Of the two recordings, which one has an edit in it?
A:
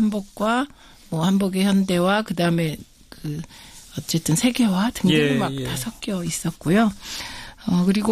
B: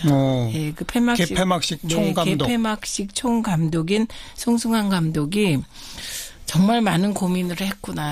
A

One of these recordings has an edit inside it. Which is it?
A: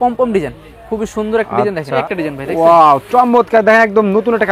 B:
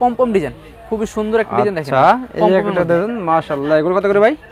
A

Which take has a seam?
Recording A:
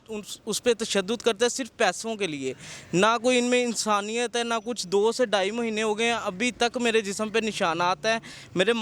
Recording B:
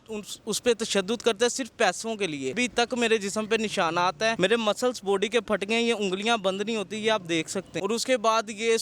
B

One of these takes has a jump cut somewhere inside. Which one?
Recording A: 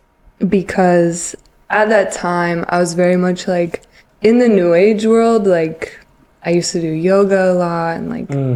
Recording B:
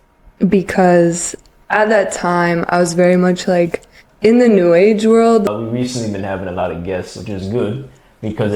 B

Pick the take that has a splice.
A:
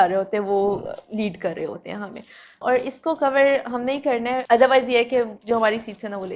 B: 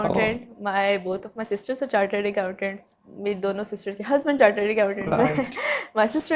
A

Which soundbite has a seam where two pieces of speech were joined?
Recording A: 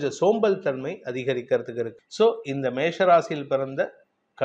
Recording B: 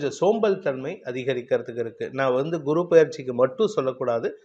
A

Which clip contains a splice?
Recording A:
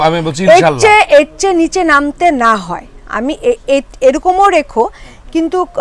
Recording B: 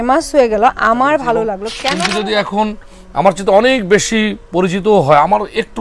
B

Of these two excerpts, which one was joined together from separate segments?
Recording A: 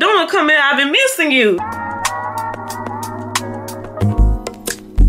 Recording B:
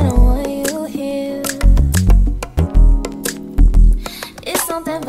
A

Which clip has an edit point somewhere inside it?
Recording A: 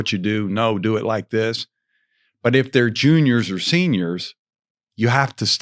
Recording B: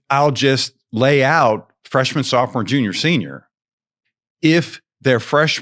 B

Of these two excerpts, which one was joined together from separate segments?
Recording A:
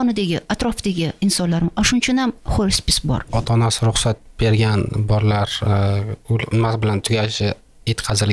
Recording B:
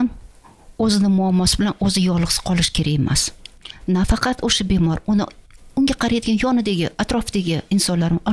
A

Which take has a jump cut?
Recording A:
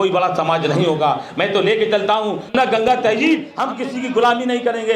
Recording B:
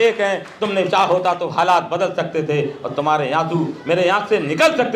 A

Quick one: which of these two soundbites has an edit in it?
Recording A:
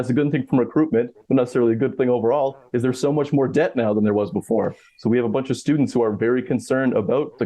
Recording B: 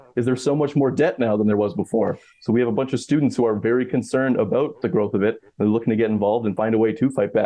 B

